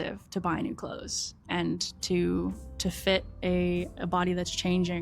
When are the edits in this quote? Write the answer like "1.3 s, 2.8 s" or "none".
1.4 s

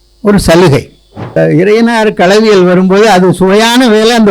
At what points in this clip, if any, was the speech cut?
1.4 s

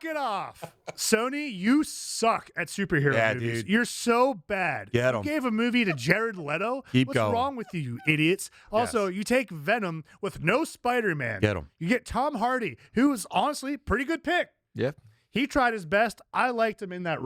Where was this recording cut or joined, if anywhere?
none

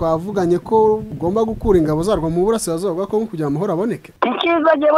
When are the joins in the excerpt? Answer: 1.1 s, 4.1 s

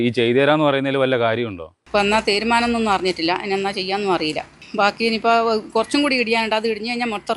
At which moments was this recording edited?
1.7 s

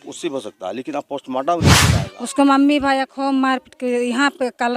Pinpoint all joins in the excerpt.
1.8 s

